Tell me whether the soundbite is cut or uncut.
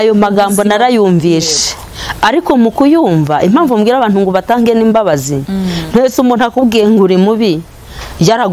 uncut